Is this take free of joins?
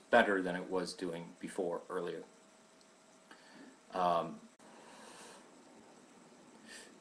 yes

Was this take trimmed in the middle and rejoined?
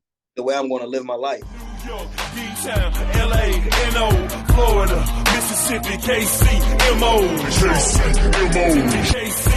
yes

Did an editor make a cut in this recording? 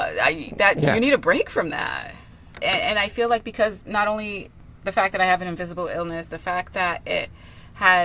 yes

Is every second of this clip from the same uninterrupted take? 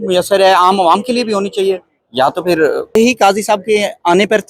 no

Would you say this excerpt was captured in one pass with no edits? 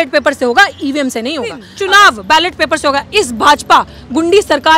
no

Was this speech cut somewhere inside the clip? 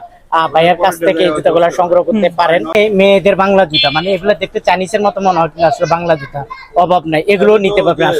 yes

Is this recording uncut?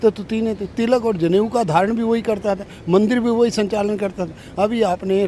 yes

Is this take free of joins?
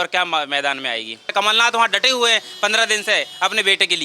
no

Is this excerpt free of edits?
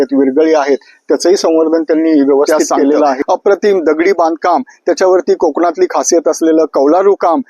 no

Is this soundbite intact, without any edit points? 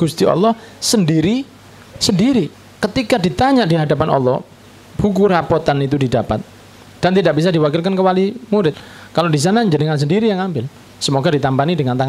no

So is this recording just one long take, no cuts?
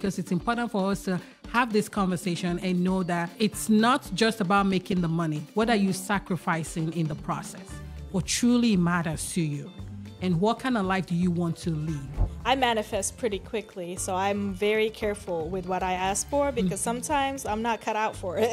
no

